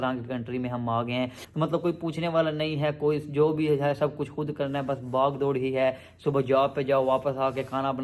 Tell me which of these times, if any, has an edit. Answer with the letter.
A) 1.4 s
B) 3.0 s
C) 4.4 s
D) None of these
A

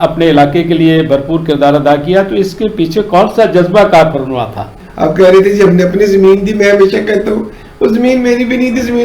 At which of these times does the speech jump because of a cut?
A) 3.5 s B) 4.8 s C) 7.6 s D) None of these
B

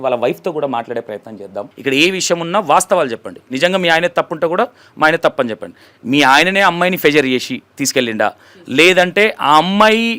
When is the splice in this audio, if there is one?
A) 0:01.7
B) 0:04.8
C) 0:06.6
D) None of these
A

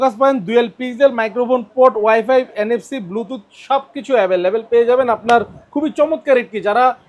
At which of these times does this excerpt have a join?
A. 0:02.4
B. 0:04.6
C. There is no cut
C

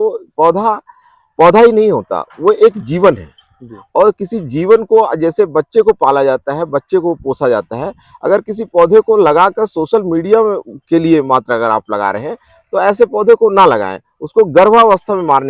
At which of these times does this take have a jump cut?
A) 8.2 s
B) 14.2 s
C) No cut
C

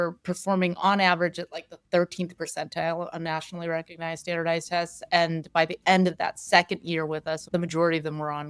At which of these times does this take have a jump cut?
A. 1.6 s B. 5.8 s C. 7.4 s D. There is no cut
C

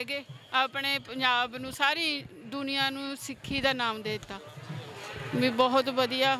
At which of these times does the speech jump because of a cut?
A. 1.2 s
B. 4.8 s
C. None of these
C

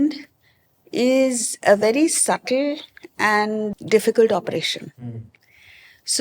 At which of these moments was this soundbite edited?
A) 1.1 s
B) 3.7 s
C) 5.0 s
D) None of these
B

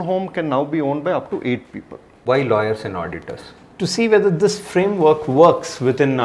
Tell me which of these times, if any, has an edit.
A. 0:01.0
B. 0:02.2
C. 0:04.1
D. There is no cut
B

